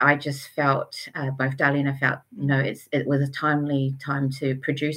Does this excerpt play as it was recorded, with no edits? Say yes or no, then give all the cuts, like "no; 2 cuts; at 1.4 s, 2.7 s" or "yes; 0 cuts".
yes; 0 cuts